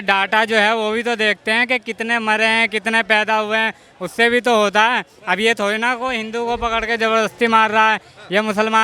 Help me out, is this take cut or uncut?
uncut